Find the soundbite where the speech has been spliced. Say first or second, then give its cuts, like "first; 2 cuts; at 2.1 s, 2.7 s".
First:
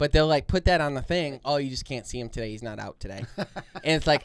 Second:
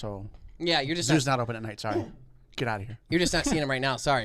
first; 1 cut; at 1.4 s